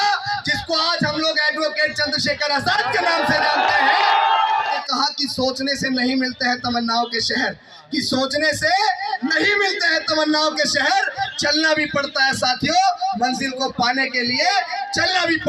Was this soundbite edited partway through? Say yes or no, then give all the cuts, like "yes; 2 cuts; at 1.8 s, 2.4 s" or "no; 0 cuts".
yes; 1 cut; at 4.8 s